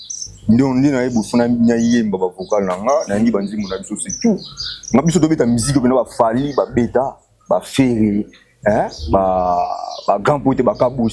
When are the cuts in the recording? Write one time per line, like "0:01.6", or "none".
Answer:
none